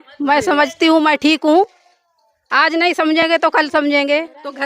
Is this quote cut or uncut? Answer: uncut